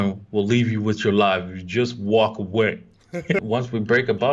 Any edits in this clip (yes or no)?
yes